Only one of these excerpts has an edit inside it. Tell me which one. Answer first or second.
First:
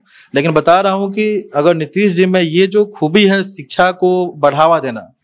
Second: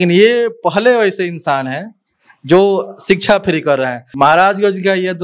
second